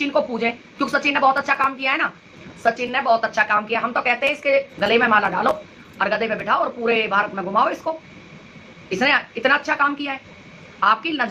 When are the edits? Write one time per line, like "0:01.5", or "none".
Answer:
none